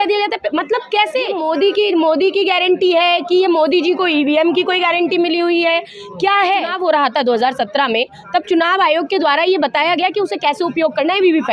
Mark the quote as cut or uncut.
cut